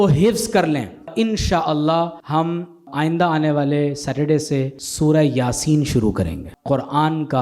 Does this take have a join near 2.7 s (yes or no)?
yes